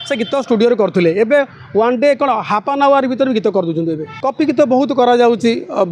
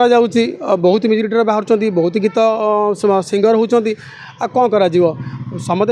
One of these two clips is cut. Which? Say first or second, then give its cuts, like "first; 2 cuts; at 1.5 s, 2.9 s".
first; 1 cut; at 4.1 s